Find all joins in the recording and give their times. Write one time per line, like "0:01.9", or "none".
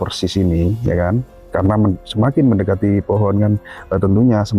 0:01.5

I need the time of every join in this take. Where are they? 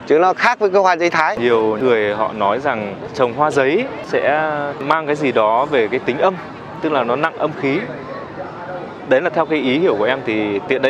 0:01.6
0:03.1
0:04.1

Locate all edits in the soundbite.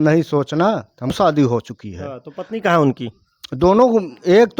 0:01.1

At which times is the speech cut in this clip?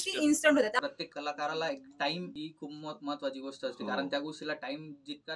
0:00.8
0:02.3

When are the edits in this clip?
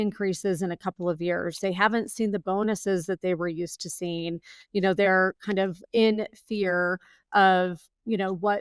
none

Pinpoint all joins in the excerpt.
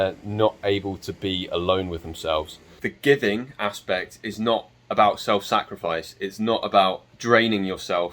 0:02.9
0:07.1

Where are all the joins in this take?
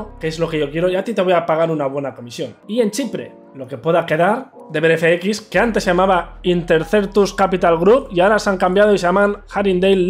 0:02.6

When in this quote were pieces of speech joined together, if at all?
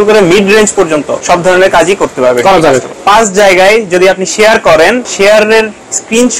0:01.1
0:03.0
0:05.1

